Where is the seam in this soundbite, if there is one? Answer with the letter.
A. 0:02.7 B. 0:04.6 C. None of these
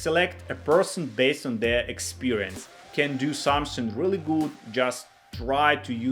A